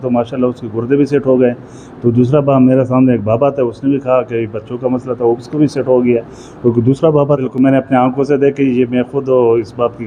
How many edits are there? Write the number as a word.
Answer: one